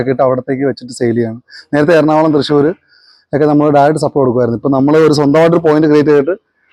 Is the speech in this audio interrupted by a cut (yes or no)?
no